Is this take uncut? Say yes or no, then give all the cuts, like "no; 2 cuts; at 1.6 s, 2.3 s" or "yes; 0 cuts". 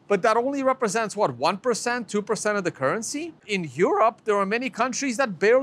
no; 1 cut; at 3.5 s